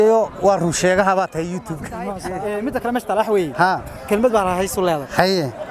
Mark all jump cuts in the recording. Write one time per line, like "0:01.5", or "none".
0:01.9